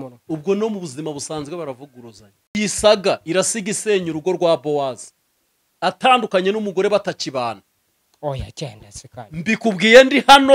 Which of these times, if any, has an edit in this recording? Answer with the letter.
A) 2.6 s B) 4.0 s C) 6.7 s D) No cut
A